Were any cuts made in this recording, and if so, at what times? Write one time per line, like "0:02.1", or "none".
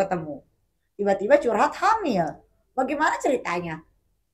none